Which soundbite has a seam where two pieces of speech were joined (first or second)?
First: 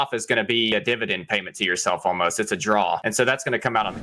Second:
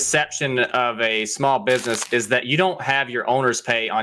first